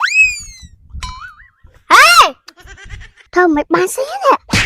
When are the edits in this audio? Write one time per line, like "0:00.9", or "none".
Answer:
0:03.2